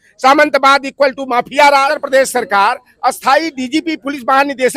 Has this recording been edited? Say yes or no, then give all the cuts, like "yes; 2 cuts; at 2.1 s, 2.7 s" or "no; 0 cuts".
yes; 1 cut; at 1.9 s